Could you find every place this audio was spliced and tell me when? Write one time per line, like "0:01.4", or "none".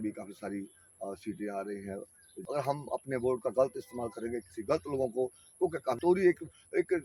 0:02.3
0:06.0